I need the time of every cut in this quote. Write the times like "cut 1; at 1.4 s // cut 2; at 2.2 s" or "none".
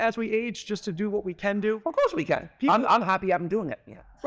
none